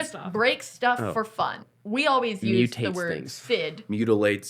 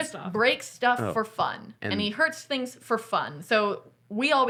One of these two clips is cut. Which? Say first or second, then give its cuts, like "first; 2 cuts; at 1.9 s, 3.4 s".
first; 1 cut; at 1.7 s